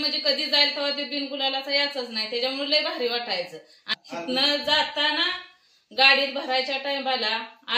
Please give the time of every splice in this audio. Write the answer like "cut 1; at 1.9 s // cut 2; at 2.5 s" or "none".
cut 1; at 3.9 s